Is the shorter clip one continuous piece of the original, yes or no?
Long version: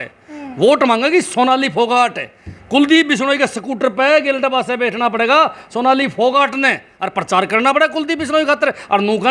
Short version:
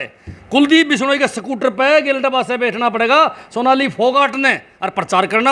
yes